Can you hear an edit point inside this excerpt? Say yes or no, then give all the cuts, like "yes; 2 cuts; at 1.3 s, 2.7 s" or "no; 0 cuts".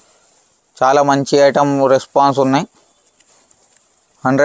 no; 0 cuts